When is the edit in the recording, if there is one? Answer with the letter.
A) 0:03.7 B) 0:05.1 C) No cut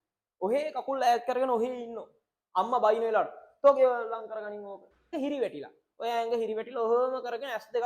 B